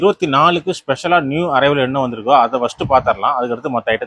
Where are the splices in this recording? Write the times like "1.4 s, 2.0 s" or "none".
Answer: none